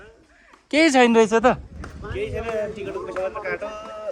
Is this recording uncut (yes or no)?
yes